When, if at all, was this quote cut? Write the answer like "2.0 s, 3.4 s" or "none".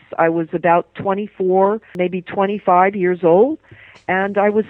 1.9 s